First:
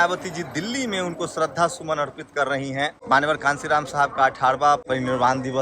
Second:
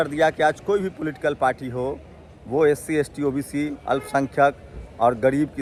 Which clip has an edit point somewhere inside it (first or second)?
first